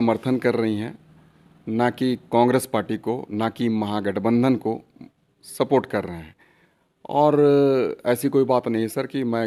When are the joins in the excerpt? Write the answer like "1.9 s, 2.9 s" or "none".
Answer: none